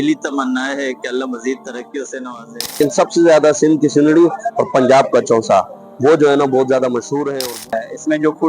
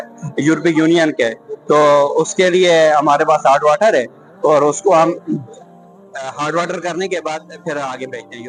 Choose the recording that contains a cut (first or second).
first